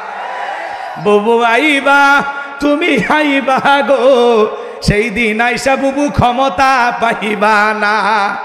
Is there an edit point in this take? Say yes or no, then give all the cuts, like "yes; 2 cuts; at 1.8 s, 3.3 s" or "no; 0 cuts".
no; 0 cuts